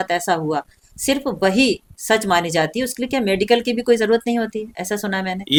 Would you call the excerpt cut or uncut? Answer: uncut